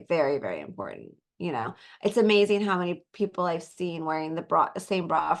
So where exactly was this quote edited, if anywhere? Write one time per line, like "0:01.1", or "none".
none